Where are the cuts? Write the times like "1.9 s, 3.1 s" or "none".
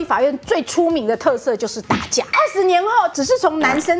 2.3 s, 3.1 s